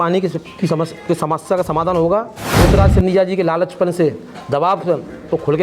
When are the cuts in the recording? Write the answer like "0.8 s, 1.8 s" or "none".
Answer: 2.4 s

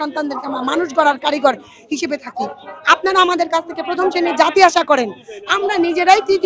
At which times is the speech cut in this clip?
none

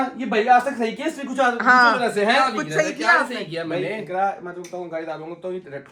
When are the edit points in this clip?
none

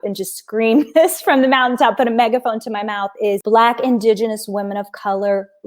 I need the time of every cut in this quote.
3.4 s

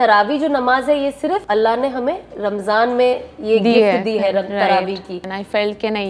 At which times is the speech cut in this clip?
1.4 s, 5.1 s

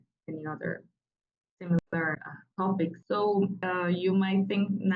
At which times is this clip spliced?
3.0 s, 3.6 s

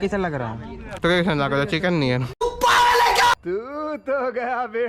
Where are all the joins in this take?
0.9 s, 2.4 s

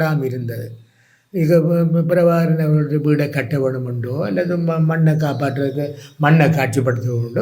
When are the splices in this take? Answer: none

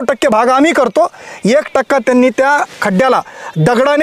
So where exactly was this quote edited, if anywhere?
none

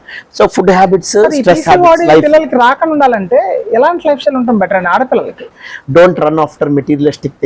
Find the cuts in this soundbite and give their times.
5.6 s

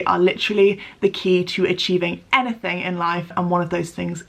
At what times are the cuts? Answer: 3.3 s

